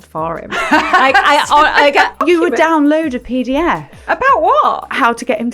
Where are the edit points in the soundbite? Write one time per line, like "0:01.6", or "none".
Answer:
0:02.2

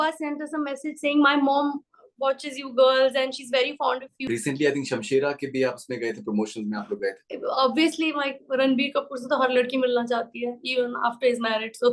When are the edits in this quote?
0:04.1
0:07.3

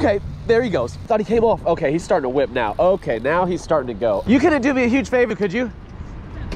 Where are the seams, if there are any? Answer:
0:01.0
0:04.2

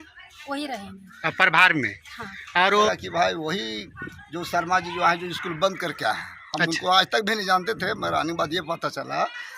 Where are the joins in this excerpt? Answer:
0:02.9

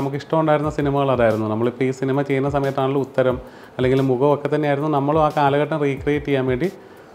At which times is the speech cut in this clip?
none

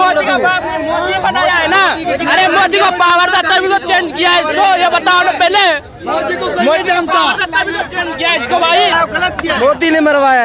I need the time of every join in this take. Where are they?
0:08.9

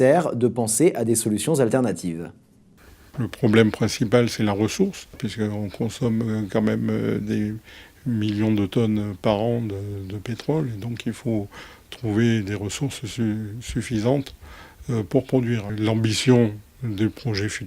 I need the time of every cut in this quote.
0:06.3

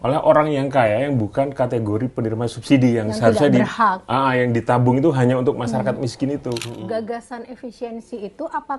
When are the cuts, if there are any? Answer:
0:06.7

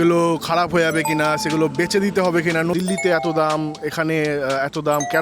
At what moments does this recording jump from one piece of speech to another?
0:02.7

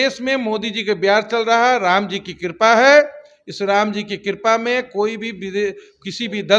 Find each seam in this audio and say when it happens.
none

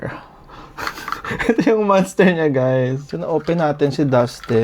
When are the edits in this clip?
0:03.1

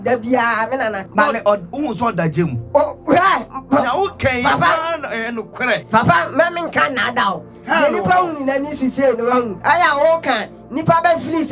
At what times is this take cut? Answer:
0:01.0
0:05.8
0:09.5

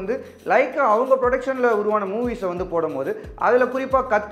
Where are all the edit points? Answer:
none

